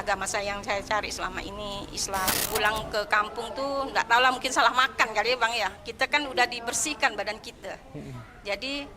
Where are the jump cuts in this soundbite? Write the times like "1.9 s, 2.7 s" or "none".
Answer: 2.4 s